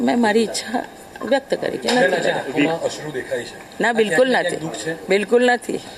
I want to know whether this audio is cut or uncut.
uncut